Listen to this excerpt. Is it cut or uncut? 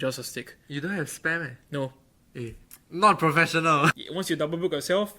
cut